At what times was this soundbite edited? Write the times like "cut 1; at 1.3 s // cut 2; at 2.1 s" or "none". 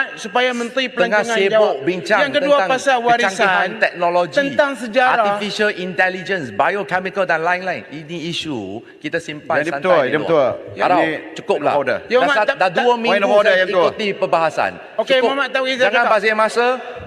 none